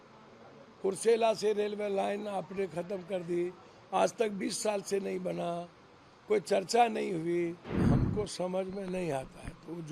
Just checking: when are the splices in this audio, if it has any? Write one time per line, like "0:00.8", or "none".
0:07.8